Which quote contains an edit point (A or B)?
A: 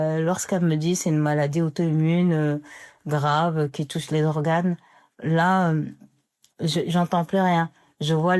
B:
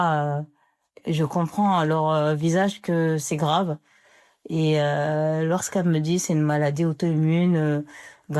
B